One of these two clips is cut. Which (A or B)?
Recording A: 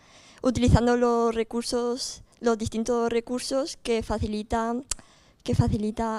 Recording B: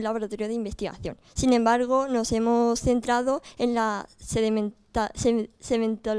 A